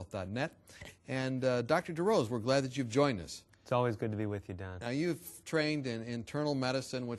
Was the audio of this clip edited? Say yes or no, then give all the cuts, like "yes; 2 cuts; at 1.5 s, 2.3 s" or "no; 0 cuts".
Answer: no; 0 cuts